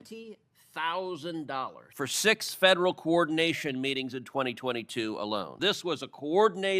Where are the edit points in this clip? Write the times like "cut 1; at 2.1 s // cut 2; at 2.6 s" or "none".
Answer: cut 1; at 1.8 s // cut 2; at 5.5 s